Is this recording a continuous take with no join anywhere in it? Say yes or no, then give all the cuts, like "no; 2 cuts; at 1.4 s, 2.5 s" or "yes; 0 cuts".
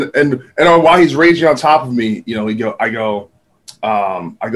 yes; 0 cuts